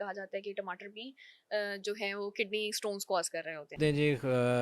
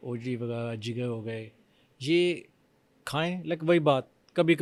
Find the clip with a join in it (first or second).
first